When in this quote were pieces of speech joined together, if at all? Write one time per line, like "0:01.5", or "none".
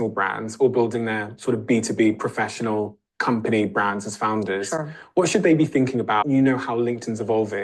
0:06.2